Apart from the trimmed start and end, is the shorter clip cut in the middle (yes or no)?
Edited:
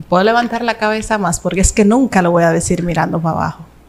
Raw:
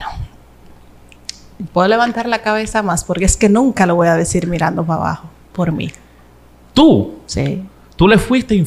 no